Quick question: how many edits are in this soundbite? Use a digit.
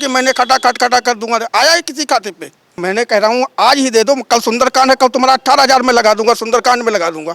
1